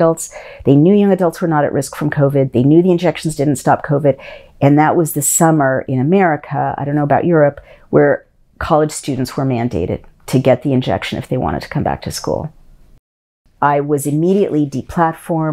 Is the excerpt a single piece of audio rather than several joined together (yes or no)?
no